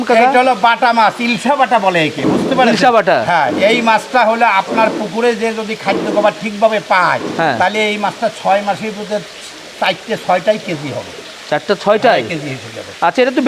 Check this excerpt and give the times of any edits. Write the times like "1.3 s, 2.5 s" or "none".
none